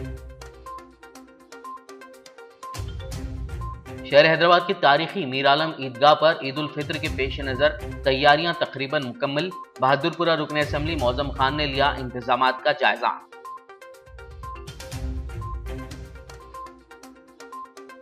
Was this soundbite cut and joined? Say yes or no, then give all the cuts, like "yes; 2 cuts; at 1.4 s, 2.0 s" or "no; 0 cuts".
yes; 3 cuts; at 1.4 s, 2.0 s, 3.8 s